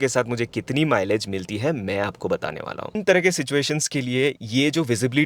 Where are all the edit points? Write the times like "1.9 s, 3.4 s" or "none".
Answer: 3.0 s